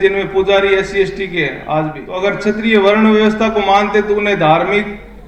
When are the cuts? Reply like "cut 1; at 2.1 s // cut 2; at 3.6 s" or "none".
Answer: cut 1; at 2.0 s